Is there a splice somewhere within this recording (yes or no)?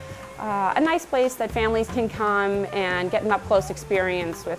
no